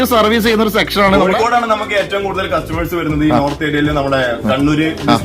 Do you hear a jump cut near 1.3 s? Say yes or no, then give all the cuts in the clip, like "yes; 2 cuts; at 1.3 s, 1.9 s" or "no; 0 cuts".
yes; 1 cut; at 1.3 s